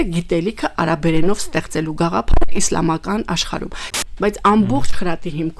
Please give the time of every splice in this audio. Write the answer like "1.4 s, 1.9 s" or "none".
3.8 s